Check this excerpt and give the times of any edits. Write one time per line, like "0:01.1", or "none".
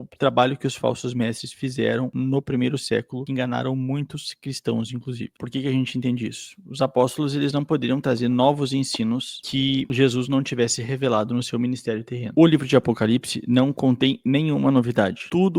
0:05.4